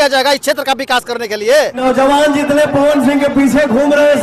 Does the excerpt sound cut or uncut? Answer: cut